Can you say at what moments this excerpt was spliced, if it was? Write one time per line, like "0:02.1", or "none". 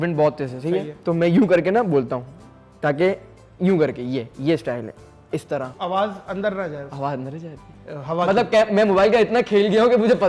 0:05.7